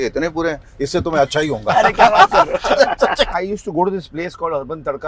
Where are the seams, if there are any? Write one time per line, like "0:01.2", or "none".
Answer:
0:03.3